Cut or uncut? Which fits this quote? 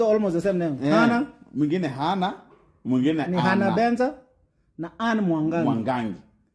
uncut